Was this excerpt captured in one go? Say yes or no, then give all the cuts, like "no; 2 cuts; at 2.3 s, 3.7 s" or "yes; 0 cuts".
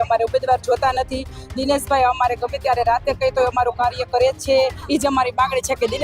no; 1 cut; at 4.8 s